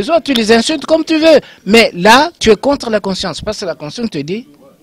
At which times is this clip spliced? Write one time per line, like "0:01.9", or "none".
none